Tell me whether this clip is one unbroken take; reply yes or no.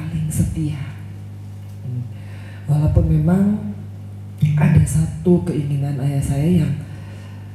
yes